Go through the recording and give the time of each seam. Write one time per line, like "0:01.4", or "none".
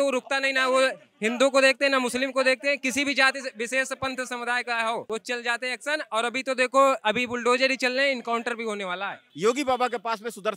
0:05.0
0:09.2

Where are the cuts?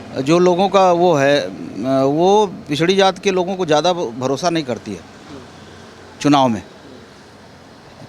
none

